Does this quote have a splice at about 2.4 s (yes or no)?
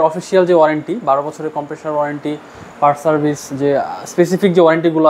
no